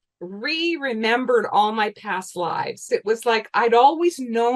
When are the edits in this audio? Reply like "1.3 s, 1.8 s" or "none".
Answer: 2.9 s